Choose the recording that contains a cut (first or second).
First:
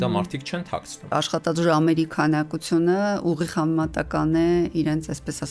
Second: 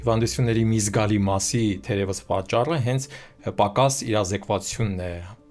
first